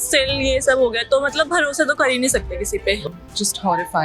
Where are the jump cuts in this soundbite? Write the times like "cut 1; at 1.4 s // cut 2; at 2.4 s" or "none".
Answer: cut 1; at 3.0 s